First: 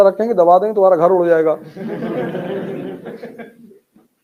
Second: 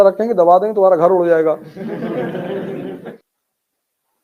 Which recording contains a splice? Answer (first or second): second